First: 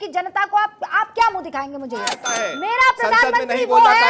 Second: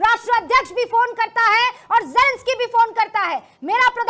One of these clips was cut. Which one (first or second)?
first